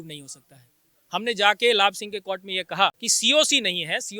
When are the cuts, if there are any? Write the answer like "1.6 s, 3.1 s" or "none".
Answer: 3.1 s